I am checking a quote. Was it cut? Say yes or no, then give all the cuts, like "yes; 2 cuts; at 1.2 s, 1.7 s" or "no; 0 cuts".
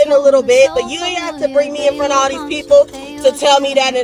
no; 0 cuts